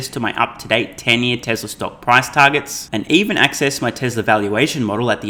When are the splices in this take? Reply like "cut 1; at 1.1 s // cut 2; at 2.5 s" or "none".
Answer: none